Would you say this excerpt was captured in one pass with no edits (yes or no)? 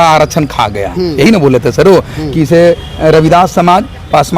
yes